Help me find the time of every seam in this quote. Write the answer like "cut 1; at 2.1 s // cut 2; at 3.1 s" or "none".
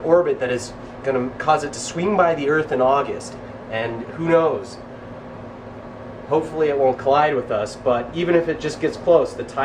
cut 1; at 3.7 s